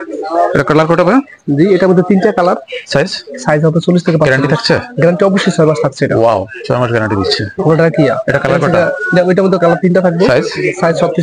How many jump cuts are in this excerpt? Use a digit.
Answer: 0